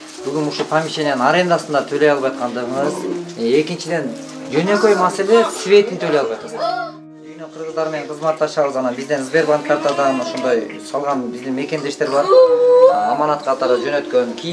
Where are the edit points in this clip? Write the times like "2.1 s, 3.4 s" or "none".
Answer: 7.1 s